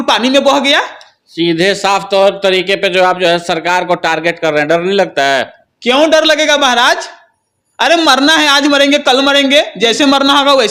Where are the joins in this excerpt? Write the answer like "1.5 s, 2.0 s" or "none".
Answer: none